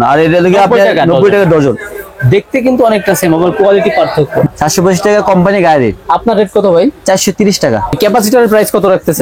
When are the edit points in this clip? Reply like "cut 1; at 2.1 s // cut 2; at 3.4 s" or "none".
cut 1; at 4.5 s // cut 2; at 7.9 s